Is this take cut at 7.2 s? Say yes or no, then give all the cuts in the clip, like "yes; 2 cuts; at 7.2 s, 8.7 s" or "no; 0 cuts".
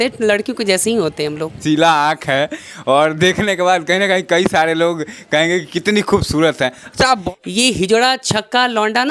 yes; 2 cuts; at 1.6 s, 7.2 s